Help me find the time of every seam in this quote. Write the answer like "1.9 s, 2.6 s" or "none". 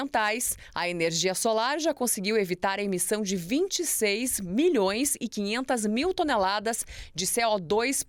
none

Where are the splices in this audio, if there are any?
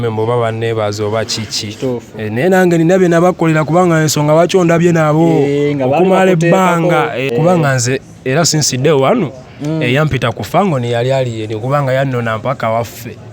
7.3 s

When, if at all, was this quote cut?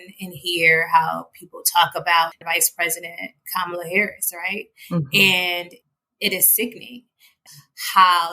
2.4 s, 7.4 s

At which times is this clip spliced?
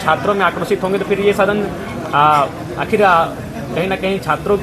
none

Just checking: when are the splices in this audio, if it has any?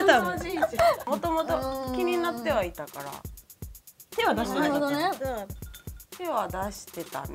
1.0 s

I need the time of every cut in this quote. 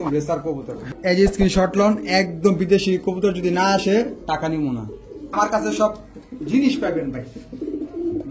0.9 s, 5.3 s

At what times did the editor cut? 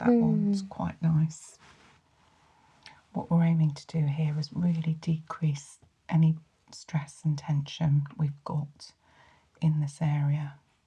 1.5 s

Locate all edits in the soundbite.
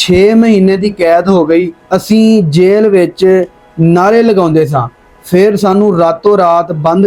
1.8 s

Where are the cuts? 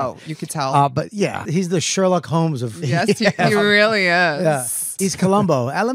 1.4 s, 4.8 s

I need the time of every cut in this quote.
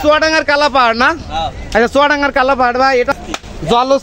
3.1 s

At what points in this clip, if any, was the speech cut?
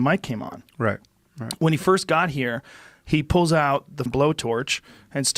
4.0 s

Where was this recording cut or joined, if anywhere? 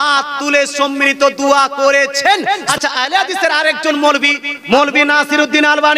2.6 s, 4.5 s

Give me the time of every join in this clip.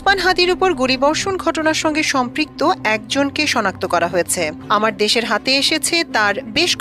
none

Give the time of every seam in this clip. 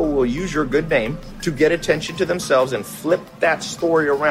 1.3 s

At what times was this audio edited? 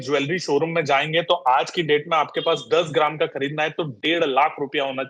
none

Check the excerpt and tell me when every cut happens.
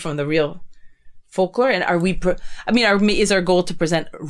none

